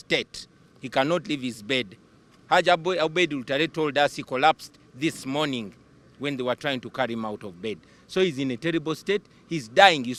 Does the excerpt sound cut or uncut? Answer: uncut